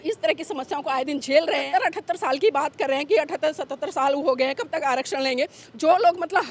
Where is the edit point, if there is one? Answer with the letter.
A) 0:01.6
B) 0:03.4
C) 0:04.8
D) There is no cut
A